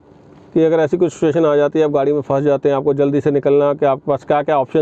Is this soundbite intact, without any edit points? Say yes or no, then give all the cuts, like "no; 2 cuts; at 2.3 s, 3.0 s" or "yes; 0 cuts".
yes; 0 cuts